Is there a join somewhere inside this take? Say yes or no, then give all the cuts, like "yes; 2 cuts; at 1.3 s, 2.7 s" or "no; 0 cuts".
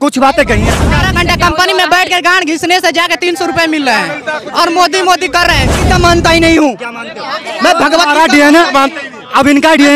yes; 2 cuts; at 1.0 s, 5.7 s